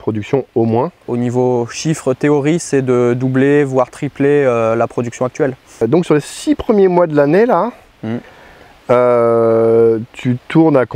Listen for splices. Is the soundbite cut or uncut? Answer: cut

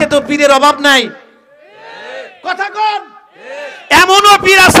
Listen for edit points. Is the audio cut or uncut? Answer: uncut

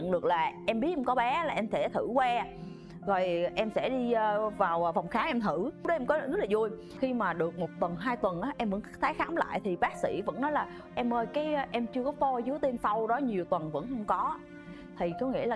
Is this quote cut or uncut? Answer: uncut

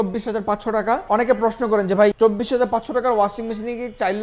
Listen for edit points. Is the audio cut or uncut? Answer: cut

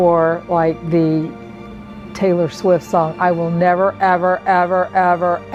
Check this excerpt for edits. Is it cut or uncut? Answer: uncut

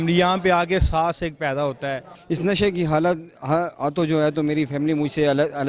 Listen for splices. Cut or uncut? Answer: cut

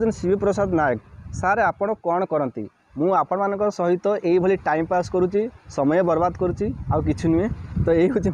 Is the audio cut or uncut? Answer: uncut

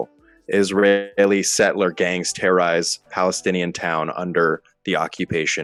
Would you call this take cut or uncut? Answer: uncut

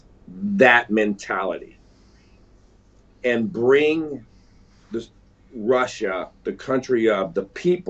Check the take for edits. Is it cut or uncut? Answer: uncut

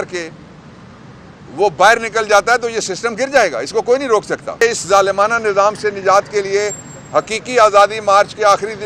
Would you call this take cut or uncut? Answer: cut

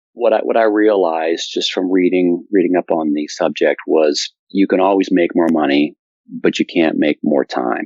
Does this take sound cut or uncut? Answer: uncut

